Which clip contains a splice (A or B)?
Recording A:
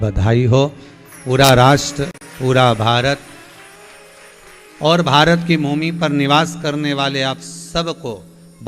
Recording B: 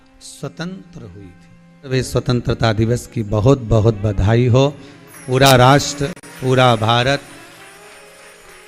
B